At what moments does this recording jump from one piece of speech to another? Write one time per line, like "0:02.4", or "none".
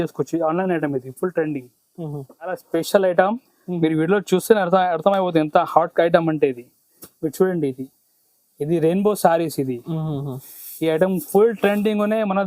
0:02.5